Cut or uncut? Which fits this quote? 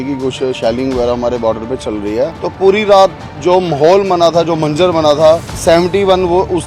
cut